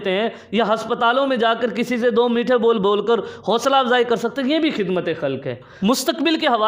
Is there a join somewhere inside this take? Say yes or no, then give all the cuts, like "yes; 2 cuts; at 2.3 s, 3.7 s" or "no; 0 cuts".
yes; 1 cut; at 5.6 s